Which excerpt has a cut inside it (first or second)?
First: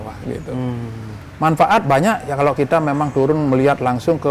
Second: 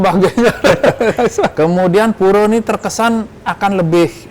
second